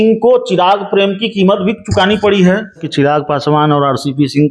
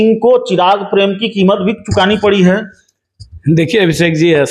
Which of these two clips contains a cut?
first; 1 cut; at 2.9 s

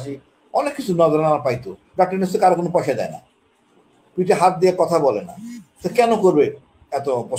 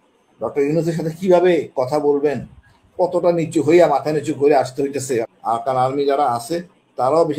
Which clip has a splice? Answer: second; 1 cut; at 5.3 s

